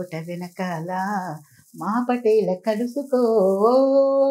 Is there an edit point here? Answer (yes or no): no